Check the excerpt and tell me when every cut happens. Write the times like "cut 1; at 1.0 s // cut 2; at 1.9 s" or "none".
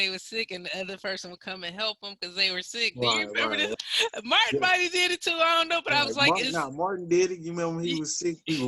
cut 1; at 3.7 s